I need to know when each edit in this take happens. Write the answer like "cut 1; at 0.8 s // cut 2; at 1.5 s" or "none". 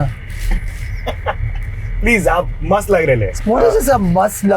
cut 1; at 3.3 s